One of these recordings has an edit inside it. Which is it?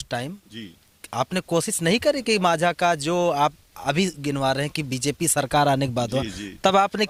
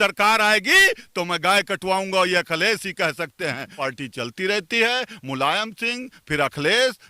second; 1 cut; at 3.8 s

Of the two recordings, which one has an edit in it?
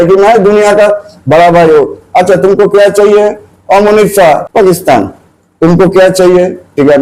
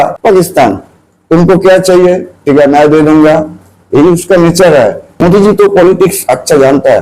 second; 1 cut; at 5.1 s

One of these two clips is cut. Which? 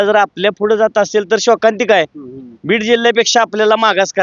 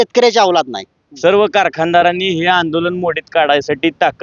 second; 1 cut; at 1.0 s

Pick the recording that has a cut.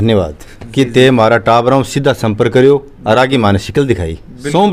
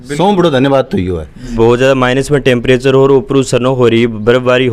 second; 1 cut; at 1.5 s

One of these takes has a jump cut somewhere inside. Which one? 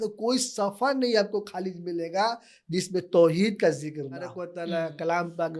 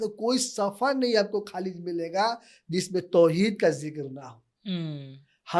first; 1 cut; at 4.4 s

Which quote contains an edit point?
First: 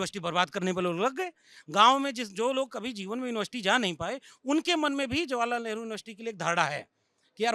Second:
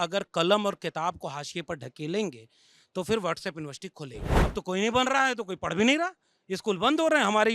second; 1 cut; at 4.2 s

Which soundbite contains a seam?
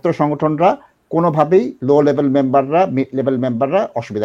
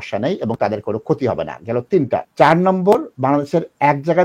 second; 1 cut; at 2.3 s

